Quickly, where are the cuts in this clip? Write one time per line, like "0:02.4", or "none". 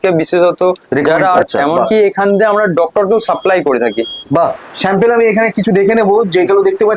0:01.4
0:04.6